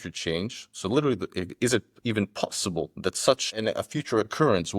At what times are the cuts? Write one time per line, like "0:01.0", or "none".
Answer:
0:03.5